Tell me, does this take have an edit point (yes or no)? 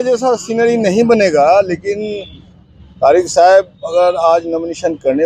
no